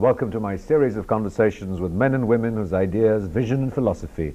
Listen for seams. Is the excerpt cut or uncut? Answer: uncut